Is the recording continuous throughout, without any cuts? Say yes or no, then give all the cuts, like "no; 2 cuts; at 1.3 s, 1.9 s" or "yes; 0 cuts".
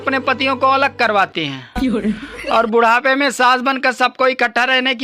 yes; 0 cuts